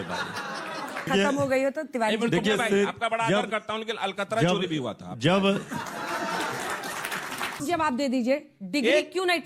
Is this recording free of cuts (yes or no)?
no